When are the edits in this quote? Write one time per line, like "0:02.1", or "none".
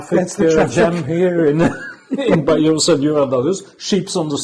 none